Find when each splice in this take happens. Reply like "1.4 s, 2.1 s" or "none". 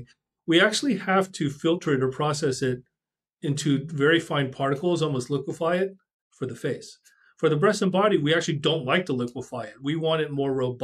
none